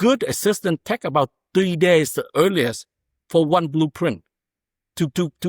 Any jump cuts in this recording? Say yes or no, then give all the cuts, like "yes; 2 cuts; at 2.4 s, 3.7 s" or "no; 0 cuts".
no; 0 cuts